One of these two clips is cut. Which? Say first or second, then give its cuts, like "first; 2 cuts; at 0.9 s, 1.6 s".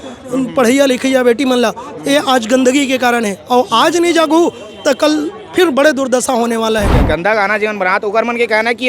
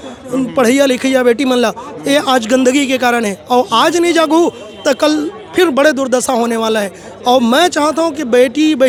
first; 1 cut; at 7.0 s